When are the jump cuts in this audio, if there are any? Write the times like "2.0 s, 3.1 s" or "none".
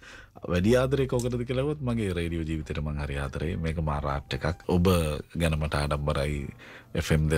4.6 s

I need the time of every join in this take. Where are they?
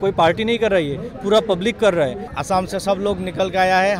2.3 s

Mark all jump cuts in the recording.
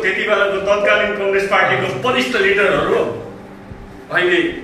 none

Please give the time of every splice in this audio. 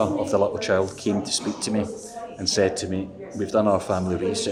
none

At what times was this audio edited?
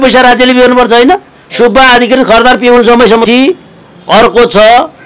3.3 s

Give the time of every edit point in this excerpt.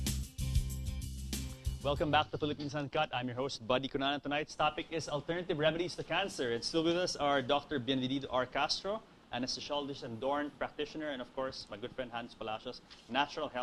none

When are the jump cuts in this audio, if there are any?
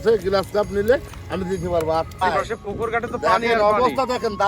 2.2 s

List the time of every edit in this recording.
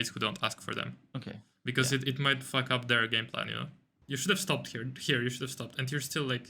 3.9 s

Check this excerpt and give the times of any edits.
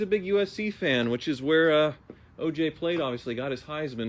none

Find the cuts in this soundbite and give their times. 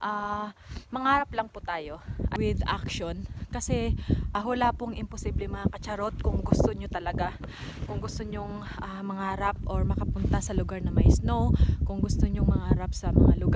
2.3 s, 4.3 s

